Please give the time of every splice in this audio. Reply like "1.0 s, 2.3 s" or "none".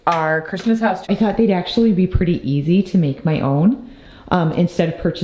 1.1 s